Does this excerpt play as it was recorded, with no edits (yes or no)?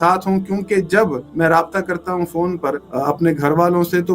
no